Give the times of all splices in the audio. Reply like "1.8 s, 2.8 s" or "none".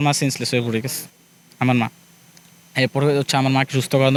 none